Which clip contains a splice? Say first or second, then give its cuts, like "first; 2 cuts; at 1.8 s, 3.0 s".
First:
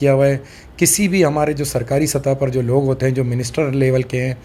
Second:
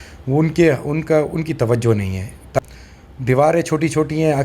second; 1 cut; at 2.5 s